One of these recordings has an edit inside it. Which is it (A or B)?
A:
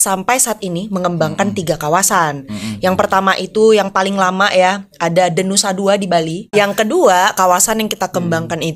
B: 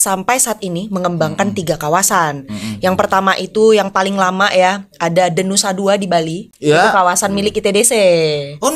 A